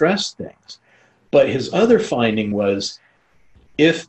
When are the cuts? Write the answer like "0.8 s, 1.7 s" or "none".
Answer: 2.5 s

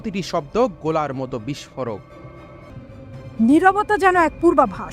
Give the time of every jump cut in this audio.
2.7 s

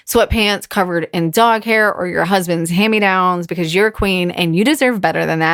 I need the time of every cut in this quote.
none

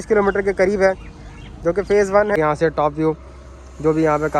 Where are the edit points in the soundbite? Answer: 2.4 s

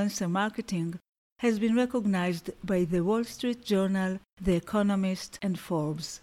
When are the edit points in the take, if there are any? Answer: 5.3 s

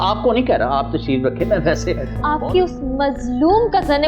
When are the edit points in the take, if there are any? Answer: 2.1 s

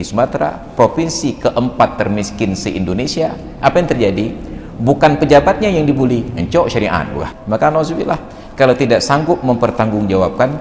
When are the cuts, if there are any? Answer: 7.3 s

